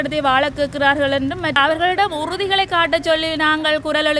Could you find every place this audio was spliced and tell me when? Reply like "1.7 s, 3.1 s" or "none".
1.6 s